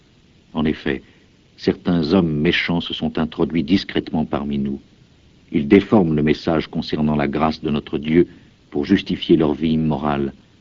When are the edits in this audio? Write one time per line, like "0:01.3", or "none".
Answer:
0:03.6